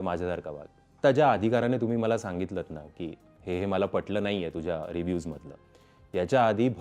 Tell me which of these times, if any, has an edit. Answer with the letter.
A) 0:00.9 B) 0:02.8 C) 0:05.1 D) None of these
A